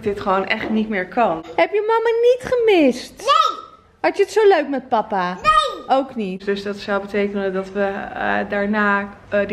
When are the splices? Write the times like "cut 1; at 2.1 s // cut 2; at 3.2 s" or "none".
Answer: cut 1; at 1.5 s // cut 2; at 6.4 s